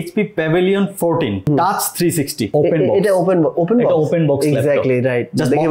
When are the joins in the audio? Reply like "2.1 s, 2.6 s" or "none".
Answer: 1.5 s, 2.5 s